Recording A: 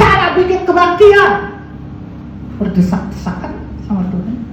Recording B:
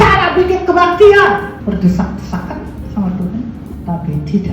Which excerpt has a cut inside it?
B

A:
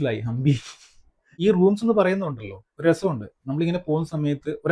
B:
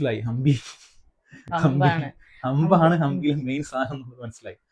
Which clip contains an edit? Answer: A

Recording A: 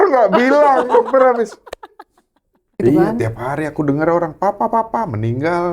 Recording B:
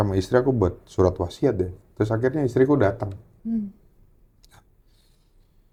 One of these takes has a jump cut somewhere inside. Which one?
A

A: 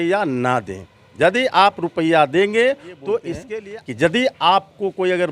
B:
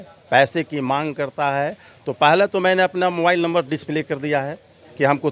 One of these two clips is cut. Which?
A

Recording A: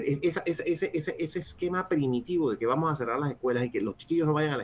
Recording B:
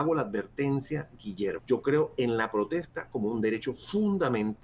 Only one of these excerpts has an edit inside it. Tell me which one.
B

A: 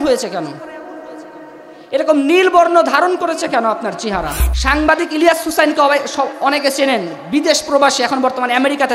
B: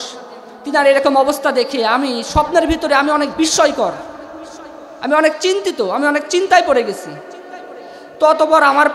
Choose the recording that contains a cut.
A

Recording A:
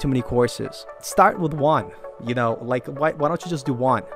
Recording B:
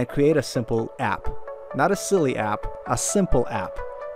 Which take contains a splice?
B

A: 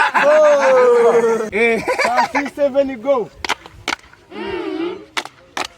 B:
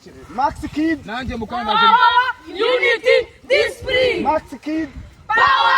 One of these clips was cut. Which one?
A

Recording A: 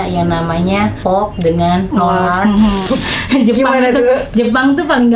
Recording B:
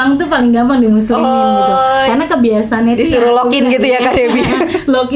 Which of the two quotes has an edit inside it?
A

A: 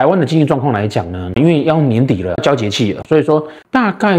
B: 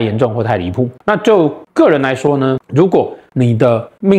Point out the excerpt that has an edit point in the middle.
B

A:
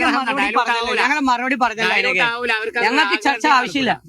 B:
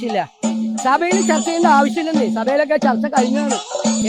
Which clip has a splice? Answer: A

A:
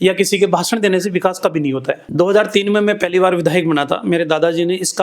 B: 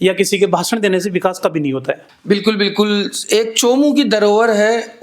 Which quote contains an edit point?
A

